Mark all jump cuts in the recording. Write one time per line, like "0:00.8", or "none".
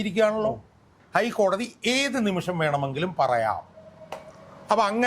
0:00.9

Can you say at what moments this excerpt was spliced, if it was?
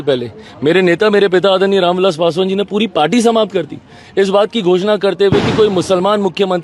none

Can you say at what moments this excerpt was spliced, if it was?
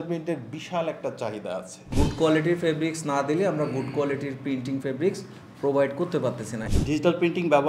0:01.9
0:06.5

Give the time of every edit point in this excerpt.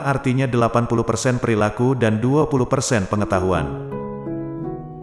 0:03.7

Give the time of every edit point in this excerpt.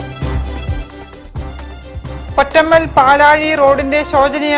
0:01.9

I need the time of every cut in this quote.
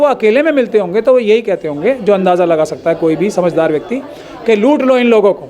none

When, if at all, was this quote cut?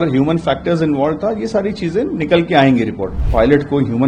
0:03.1

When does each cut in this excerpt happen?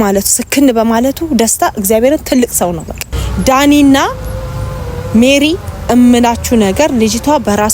0:03.0

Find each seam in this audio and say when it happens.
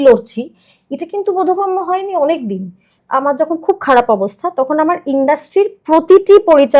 0:03.0

